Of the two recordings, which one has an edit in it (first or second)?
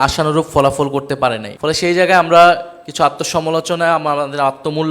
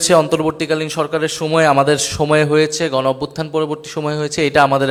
first